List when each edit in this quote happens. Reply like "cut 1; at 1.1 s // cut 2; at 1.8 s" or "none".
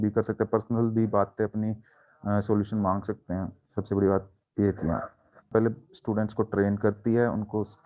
cut 1; at 5.5 s